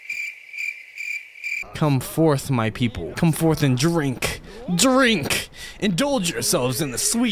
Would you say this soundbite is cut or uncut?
uncut